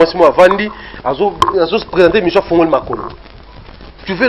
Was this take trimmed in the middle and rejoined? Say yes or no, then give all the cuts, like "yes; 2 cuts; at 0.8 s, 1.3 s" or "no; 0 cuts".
no; 0 cuts